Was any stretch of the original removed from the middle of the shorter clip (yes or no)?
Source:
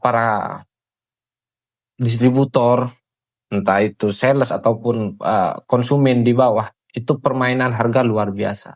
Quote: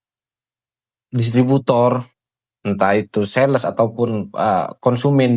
no